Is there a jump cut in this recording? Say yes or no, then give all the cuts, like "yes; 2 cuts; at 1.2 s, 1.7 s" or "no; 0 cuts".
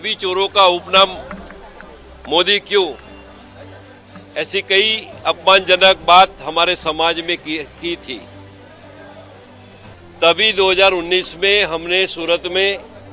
no; 0 cuts